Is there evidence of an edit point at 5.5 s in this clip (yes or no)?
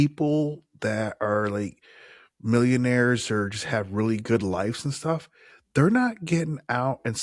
no